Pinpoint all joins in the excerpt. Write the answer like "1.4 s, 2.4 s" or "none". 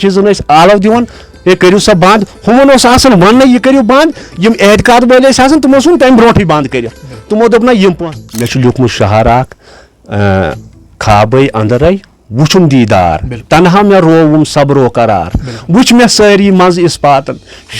8.0 s